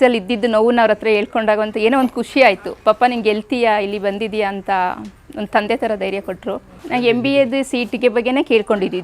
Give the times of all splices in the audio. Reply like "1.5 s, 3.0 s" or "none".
6.7 s